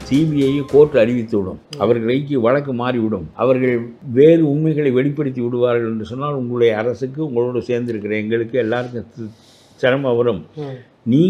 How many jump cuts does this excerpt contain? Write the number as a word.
zero